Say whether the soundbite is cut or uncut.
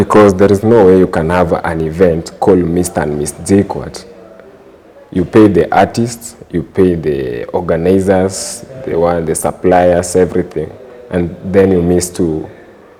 uncut